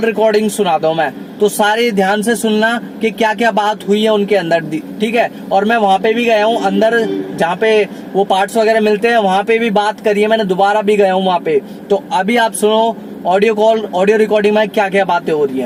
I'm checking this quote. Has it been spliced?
no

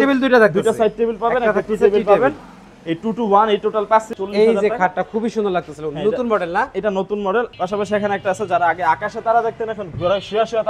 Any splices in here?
yes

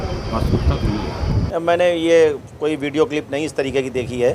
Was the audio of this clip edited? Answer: yes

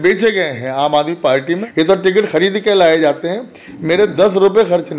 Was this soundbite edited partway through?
yes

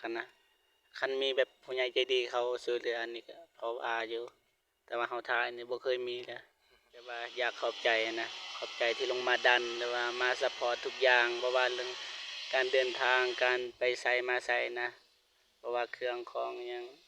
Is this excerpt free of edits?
no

